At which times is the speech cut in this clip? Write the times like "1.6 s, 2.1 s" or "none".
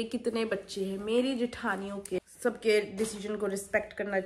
2.2 s